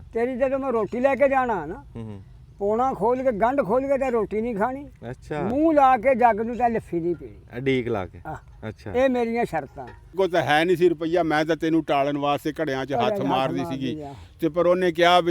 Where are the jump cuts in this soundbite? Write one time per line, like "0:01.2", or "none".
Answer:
0:10.2